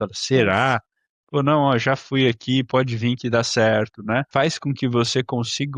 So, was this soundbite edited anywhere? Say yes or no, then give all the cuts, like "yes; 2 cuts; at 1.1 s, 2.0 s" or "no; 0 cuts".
yes; 1 cut; at 4.3 s